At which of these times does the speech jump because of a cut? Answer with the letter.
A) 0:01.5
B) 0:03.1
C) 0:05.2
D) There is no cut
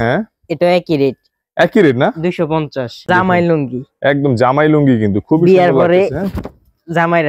B